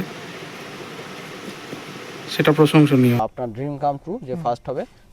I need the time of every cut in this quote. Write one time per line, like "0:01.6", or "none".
0:03.2